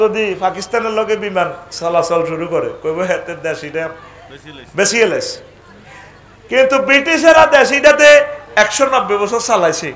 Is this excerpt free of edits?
yes; 0 cuts

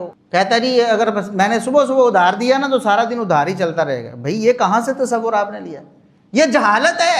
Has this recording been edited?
no; 0 cuts

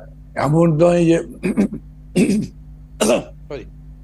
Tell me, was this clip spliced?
no; 0 cuts

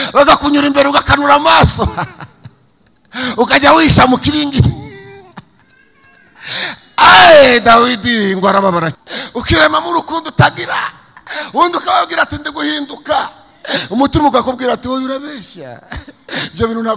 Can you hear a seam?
yes; 1 cut; at 9.0 s

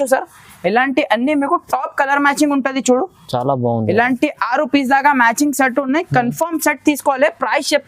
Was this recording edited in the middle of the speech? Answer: no; 0 cuts

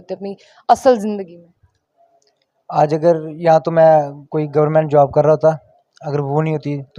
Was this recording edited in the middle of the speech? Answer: no; 0 cuts

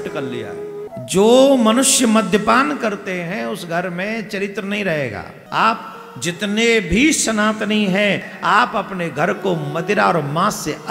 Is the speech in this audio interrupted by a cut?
yes; 3 cuts; at 0.9 s, 5.4 s, 8.3 s

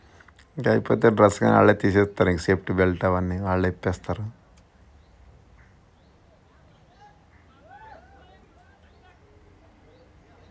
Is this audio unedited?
yes; 0 cuts

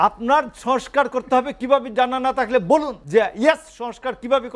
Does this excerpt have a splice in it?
yes; 1 cut; at 3.0 s

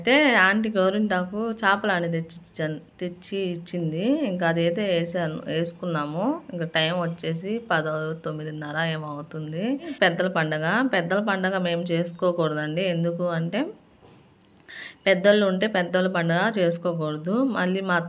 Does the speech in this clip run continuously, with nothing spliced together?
no; 1 cut; at 9.9 s

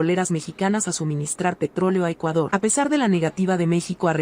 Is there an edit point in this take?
yes; 1 cut; at 2.5 s

